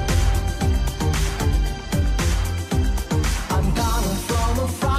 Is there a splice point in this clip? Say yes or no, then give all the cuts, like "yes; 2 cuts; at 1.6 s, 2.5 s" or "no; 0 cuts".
no; 0 cuts